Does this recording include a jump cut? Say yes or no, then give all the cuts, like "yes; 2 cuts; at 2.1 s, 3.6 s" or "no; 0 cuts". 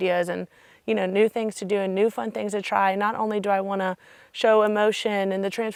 no; 0 cuts